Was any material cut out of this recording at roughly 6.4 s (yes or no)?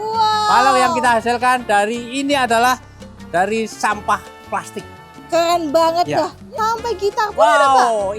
yes